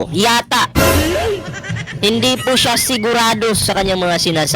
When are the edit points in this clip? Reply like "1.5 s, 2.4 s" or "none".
3.6 s